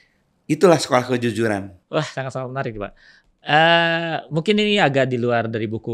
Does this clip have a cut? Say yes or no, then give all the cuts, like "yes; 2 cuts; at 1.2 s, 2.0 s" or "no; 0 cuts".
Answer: yes; 1 cut; at 1.8 s